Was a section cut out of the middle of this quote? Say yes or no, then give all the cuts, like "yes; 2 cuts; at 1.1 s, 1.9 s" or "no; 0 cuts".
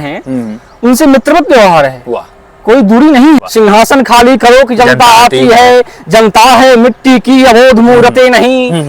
yes; 1 cut; at 3.4 s